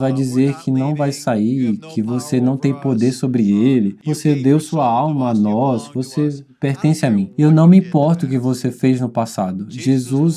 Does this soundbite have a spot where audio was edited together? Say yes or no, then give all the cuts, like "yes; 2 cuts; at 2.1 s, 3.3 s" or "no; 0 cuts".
yes; 2 cuts; at 4.0 s, 7.3 s